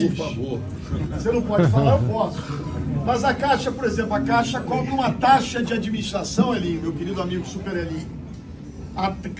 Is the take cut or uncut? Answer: uncut